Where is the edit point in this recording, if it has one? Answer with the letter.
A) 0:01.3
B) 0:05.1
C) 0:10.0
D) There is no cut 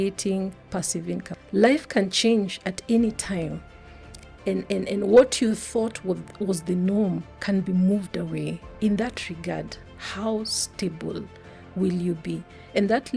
A